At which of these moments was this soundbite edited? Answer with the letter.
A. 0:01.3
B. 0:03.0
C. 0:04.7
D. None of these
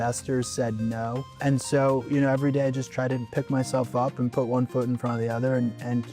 A